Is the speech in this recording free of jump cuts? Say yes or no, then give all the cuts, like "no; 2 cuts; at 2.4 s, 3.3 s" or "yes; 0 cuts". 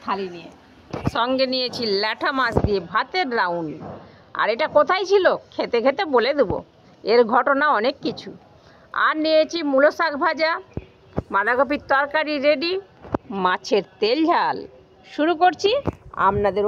no; 1 cut; at 0.9 s